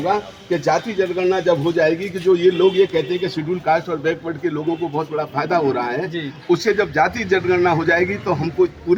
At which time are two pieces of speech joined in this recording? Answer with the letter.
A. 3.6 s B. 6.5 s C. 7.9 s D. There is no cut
D